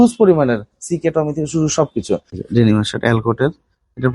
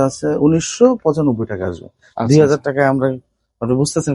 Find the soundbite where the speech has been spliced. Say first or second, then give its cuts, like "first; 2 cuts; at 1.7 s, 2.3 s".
first; 1 cut; at 2.4 s